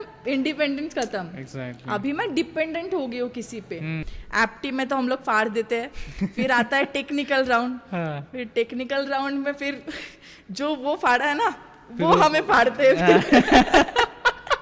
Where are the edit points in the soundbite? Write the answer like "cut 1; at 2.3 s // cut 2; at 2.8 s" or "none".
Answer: cut 1; at 4.0 s

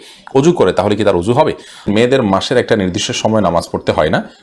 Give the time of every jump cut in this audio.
cut 1; at 1.9 s

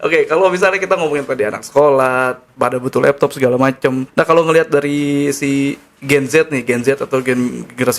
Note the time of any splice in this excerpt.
cut 1; at 4.0 s

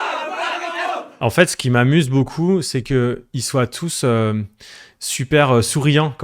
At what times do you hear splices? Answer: cut 1; at 1.2 s

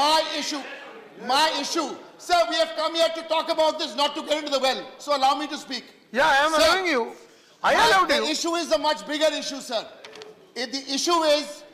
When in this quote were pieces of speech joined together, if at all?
none

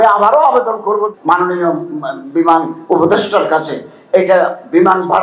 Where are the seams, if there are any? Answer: cut 1; at 1.1 s

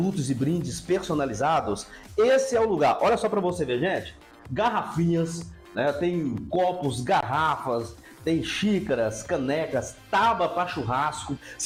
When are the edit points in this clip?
none

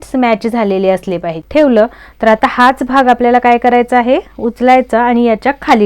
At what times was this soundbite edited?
cut 1; at 1.3 s

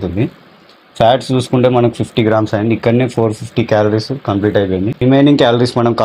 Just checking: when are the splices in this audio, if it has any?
cut 1; at 5.0 s

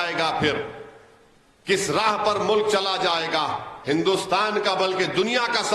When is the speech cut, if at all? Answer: cut 1; at 3.7 s

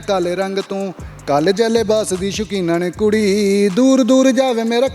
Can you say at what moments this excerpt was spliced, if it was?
none

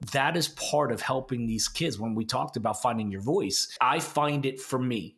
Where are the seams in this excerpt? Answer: cut 1; at 3.6 s

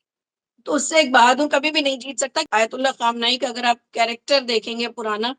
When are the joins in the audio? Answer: cut 1; at 2.4 s

